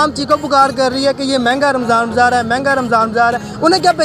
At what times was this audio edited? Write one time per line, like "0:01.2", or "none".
none